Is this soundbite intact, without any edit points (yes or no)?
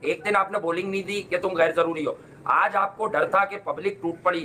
yes